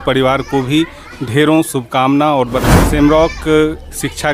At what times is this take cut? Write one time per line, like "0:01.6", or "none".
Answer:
0:02.7

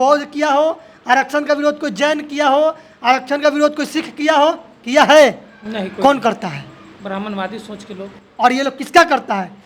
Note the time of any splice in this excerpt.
none

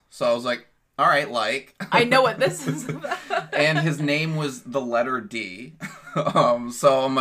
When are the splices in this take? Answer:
none

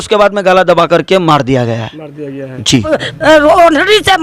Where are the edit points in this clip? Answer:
0:02.9

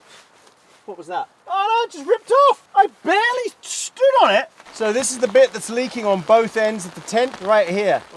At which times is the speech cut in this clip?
0:01.4
0:02.6
0:04.6
0:07.4

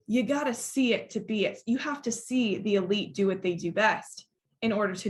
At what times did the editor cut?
none

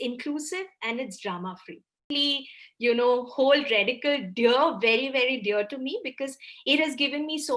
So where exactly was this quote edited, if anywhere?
0:02.1

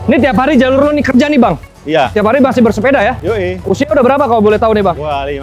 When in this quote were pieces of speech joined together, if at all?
0:02.1
0:03.6

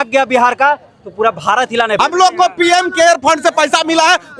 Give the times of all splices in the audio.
0:01.9

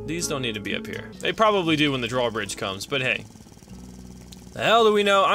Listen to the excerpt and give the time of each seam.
0:01.1

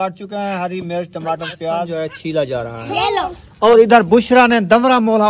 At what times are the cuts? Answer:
0:01.9

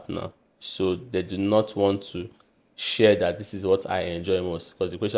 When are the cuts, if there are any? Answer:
none

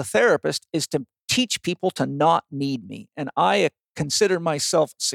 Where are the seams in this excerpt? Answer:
none

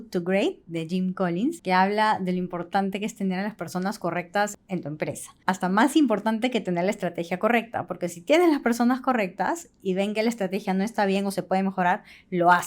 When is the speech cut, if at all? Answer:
0:01.6
0:04.5

